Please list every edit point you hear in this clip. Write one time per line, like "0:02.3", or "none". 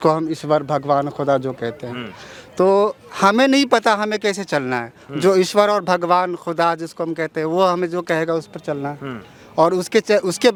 none